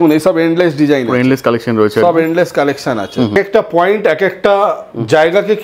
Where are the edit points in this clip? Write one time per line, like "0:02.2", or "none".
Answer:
0:03.3